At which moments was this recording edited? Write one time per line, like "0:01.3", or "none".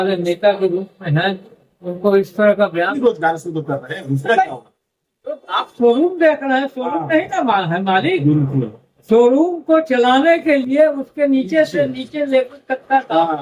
0:02.9